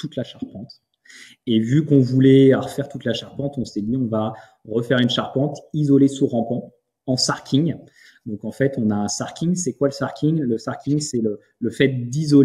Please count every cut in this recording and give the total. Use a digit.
0